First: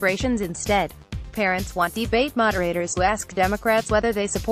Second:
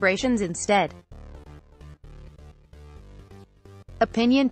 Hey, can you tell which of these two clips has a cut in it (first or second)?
first